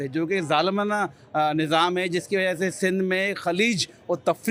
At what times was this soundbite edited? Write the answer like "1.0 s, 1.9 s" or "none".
none